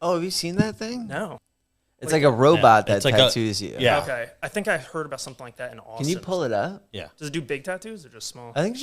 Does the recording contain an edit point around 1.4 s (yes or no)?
yes